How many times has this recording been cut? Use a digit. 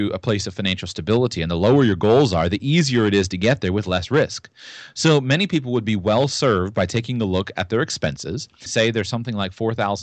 0